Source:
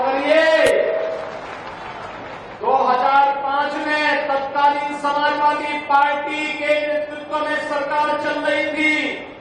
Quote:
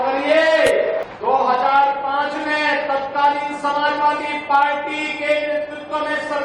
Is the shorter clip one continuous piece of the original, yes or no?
no